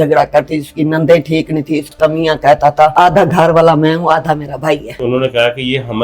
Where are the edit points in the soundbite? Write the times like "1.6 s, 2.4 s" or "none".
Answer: 1.9 s, 2.9 s, 5.0 s